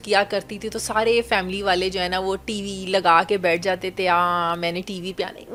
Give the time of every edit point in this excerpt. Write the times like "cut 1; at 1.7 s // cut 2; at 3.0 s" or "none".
none